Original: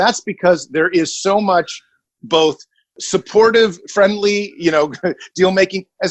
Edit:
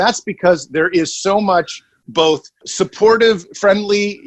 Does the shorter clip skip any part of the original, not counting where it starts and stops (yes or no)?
yes